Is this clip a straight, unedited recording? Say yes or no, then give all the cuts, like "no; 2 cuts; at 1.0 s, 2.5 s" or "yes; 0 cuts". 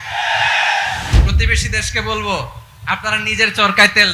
no; 1 cut; at 1.1 s